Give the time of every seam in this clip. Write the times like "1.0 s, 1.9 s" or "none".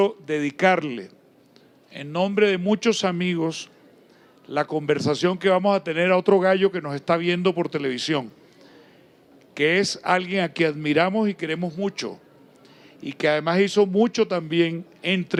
none